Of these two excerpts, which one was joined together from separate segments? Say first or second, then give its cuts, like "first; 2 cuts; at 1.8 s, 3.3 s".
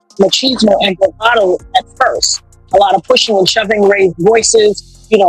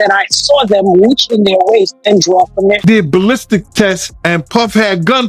second; 2 cuts; at 2.8 s, 4.1 s